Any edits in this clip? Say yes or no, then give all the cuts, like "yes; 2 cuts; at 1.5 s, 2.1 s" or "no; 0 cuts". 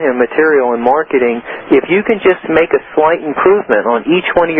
no; 0 cuts